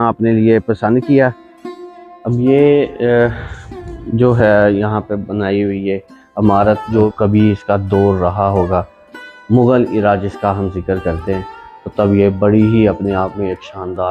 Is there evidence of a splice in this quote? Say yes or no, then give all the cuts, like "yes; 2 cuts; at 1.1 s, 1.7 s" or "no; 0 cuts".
yes; 2 cuts; at 1.5 s, 7.1 s